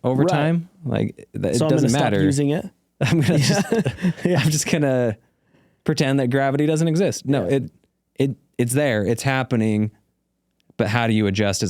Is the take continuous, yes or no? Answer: yes